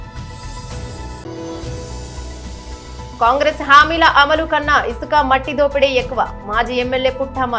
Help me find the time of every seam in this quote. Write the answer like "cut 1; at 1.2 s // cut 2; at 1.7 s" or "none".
none